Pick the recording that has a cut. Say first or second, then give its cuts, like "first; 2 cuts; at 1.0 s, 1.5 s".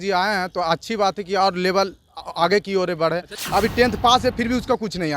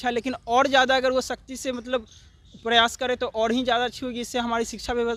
first; 1 cut; at 3.4 s